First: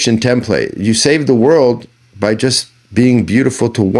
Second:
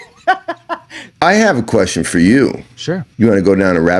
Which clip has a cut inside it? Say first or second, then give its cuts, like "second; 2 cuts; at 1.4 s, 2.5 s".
second; 2 cuts; at 1.2 s, 3.1 s